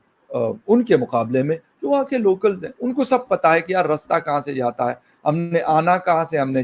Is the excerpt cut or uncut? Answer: uncut